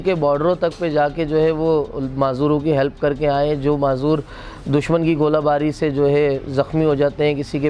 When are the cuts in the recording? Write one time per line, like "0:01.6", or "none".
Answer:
none